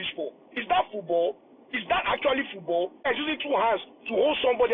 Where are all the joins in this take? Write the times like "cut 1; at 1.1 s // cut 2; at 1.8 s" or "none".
cut 1; at 3.1 s